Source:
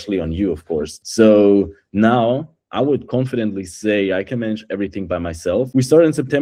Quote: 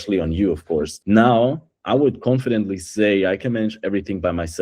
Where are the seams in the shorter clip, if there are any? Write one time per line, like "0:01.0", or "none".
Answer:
0:00.9

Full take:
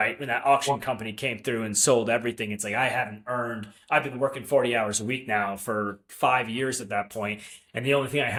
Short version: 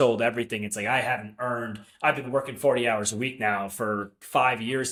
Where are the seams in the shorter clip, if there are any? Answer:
none

